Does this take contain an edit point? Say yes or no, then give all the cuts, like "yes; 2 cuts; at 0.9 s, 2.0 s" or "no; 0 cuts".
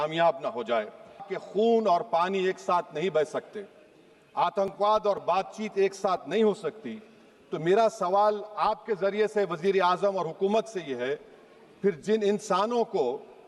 yes; 1 cut; at 1.3 s